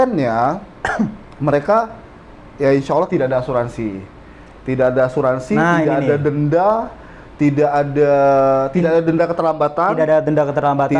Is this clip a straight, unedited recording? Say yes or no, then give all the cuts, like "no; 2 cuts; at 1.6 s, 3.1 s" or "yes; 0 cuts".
yes; 0 cuts